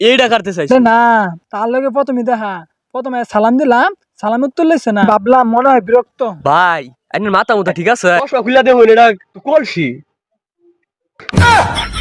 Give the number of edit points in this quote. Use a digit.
0